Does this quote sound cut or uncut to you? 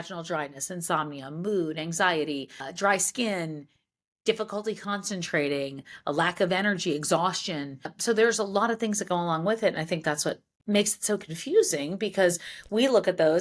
cut